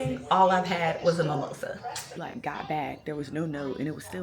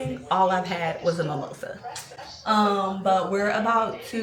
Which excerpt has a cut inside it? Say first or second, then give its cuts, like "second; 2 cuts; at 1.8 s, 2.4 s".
first; 1 cut; at 2.2 s